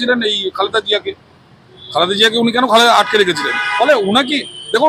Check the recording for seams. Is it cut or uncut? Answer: uncut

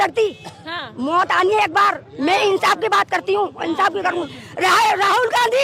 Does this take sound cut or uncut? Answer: uncut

